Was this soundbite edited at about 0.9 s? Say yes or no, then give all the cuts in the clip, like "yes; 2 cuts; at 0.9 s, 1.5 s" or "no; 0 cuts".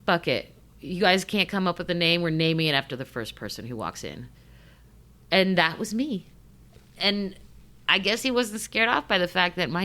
no; 0 cuts